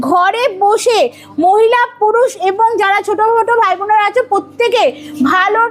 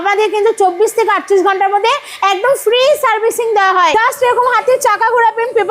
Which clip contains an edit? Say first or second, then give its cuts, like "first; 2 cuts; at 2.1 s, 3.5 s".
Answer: second; 1 cut; at 3.9 s